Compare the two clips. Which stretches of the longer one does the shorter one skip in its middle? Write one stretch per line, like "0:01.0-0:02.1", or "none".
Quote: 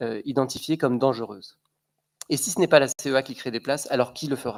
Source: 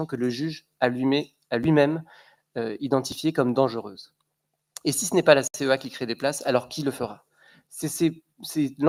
none